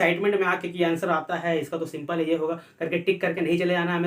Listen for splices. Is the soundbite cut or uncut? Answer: uncut